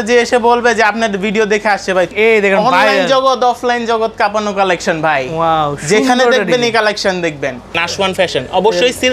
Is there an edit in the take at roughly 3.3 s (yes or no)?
no